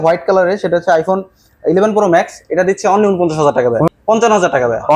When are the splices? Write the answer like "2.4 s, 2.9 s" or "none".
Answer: 3.9 s